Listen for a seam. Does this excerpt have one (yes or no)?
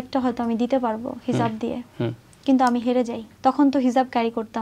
yes